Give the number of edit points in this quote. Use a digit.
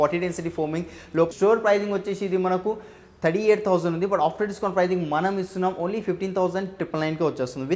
1